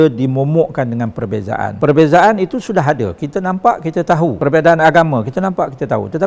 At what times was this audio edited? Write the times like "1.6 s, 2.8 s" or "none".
1.7 s, 4.4 s